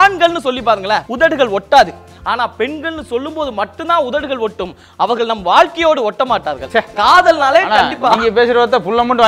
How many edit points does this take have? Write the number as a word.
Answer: three